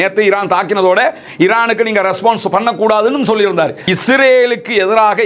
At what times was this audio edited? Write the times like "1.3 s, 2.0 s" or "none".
3.8 s